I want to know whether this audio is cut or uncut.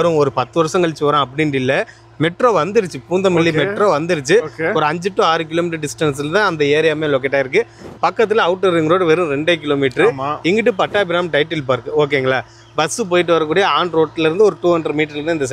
uncut